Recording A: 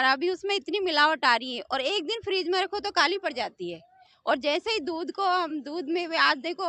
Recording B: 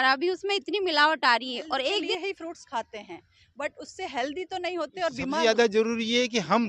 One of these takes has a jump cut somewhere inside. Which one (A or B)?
B